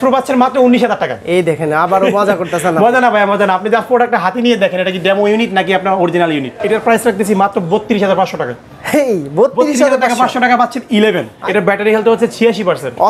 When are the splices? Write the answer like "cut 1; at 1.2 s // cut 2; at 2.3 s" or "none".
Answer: cut 1; at 6.5 s // cut 2; at 11.3 s